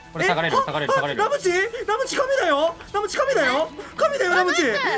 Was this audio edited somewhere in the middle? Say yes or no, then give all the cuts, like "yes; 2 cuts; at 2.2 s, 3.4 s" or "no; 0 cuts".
no; 0 cuts